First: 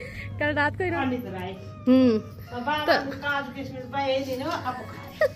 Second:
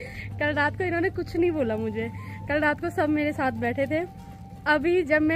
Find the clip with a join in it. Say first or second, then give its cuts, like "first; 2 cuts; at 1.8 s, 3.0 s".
first; 1 cut; at 1.0 s